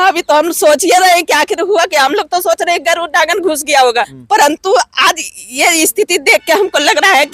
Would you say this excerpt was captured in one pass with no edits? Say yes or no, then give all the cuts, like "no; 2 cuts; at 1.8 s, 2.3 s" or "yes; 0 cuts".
no; 1 cut; at 4.2 s